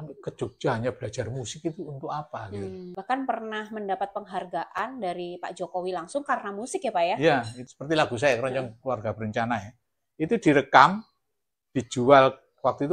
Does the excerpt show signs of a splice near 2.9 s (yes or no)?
yes